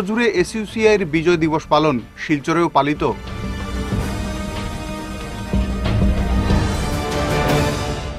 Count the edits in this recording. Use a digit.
0